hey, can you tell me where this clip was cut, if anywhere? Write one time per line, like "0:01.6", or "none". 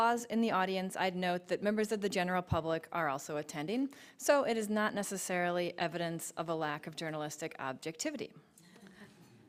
none